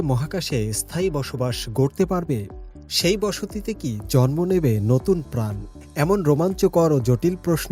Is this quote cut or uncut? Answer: uncut